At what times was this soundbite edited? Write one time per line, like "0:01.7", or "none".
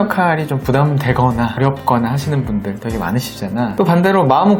0:01.6